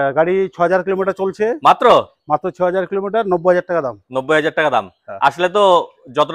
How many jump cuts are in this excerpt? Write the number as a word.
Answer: zero